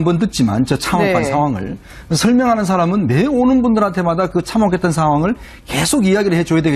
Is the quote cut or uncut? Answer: uncut